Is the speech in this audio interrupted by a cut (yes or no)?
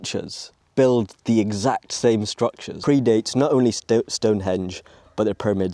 yes